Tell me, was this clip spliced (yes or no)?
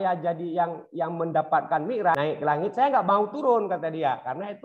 yes